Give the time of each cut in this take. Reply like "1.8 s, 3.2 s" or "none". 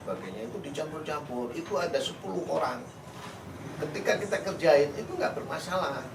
none